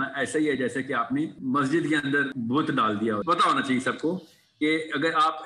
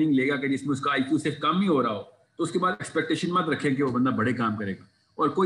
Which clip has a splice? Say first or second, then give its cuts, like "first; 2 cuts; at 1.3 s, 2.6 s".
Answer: first; 3 cuts; at 1.4 s, 2.3 s, 3.2 s